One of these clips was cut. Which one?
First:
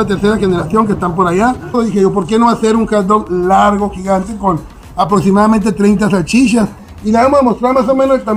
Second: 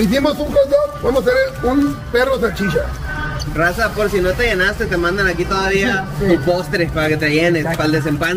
first; 2 cuts; at 1.7 s, 6.9 s

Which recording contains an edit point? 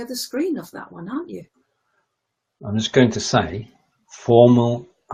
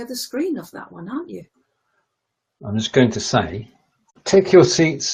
first; 1 cut; at 4.2 s

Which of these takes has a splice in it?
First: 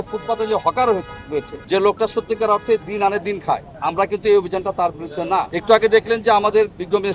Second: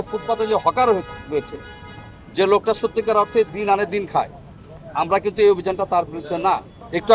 first; 3 cuts; at 1.5 s, 3.7 s, 5.5 s

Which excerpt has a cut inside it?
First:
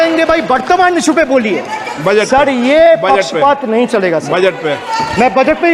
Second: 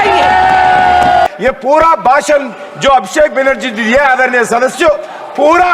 second; 1 cut; at 1.3 s

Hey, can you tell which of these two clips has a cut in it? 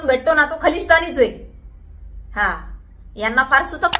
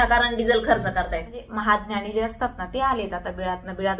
second; 1 cut; at 1.4 s

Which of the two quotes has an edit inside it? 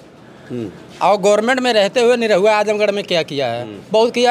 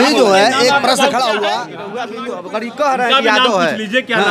second; 1 cut; at 2.1 s

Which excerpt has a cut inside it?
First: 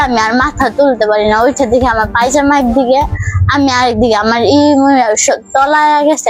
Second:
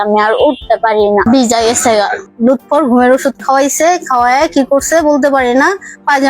second; 2 cuts; at 1.2 s, 2.2 s

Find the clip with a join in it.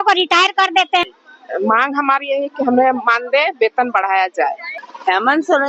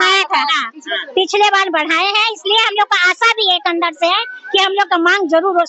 first; 2 cuts; at 1.1 s, 4.7 s

